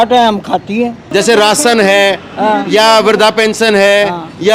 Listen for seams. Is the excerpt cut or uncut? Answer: cut